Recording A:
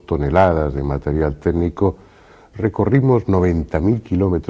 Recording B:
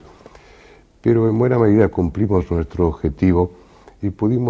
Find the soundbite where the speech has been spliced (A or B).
B